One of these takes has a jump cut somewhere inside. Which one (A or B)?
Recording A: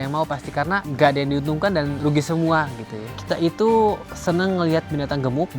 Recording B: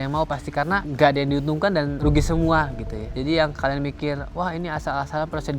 A